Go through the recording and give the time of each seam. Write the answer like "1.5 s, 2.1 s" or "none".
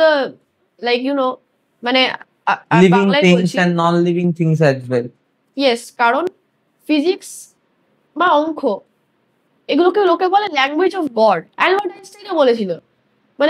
5.9 s, 11.5 s